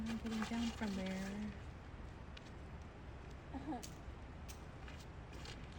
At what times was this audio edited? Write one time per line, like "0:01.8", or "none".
none